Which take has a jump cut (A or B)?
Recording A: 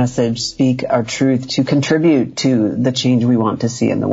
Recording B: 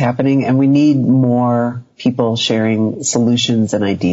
B